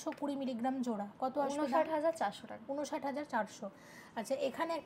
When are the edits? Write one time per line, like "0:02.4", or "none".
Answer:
none